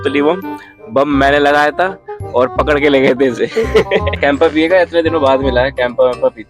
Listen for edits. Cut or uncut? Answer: cut